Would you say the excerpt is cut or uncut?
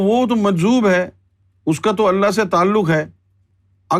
uncut